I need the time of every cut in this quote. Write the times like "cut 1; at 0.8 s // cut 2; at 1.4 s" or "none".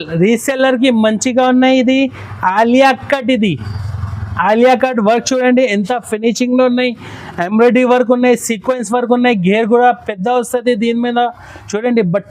none